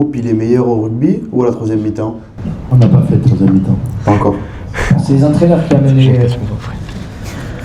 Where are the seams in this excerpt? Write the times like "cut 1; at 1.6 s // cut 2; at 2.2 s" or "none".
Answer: none